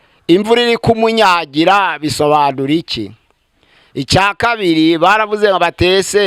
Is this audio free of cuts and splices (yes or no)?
yes